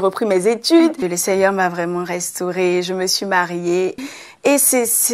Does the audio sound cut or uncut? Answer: cut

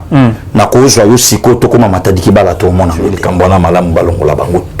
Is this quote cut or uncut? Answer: cut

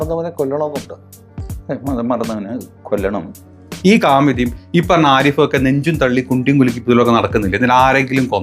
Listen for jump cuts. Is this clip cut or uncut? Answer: cut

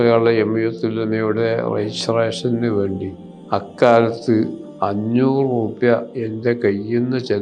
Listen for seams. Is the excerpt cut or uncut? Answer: uncut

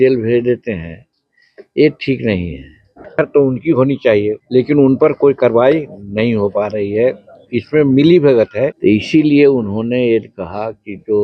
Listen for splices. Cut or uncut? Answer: cut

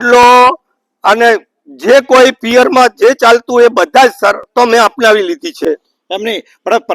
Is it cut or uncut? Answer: cut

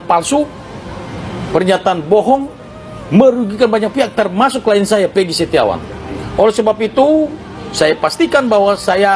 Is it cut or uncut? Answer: uncut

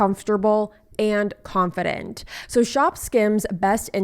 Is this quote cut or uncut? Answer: cut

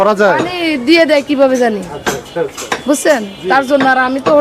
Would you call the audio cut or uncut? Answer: uncut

